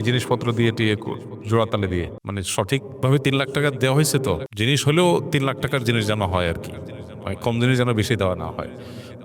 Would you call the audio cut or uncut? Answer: cut